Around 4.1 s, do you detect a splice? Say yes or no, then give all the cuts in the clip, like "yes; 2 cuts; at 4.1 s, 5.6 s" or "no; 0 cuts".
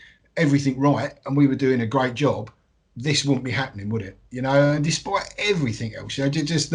no; 0 cuts